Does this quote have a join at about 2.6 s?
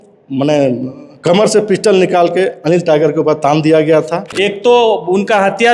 no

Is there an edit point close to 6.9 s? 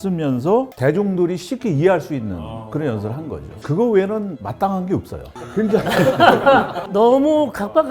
no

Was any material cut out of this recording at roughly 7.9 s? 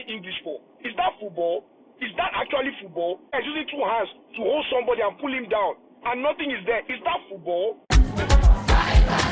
yes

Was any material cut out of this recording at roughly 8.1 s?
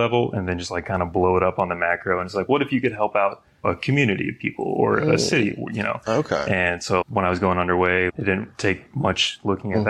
yes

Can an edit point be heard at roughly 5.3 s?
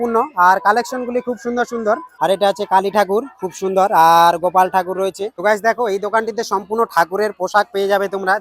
yes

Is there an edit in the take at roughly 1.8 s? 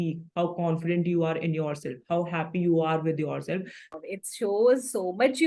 no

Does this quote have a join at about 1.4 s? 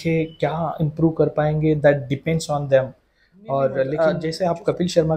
no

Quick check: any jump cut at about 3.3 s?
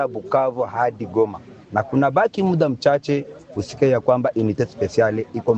no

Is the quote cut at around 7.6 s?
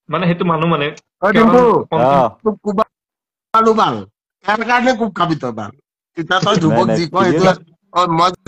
yes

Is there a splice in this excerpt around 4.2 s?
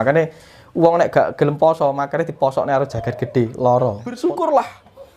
yes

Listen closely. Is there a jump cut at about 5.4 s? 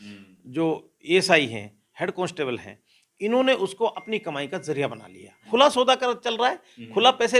yes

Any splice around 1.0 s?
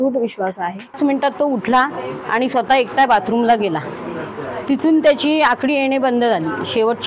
yes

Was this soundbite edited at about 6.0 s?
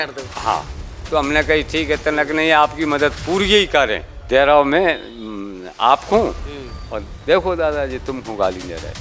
no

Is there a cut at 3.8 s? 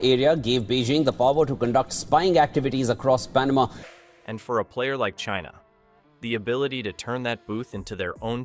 no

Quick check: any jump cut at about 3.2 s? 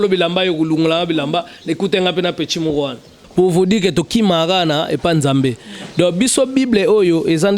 yes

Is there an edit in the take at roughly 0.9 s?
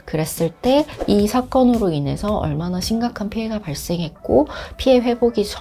yes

